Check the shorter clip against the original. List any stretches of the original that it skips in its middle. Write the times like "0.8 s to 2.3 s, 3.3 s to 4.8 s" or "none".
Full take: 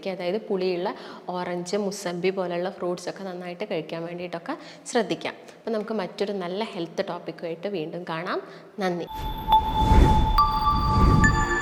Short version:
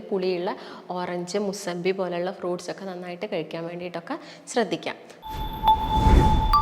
5.6 s to 9.1 s